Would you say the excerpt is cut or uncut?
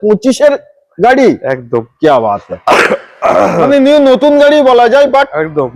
uncut